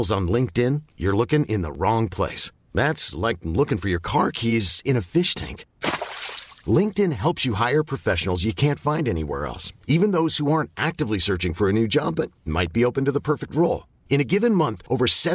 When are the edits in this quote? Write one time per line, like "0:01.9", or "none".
none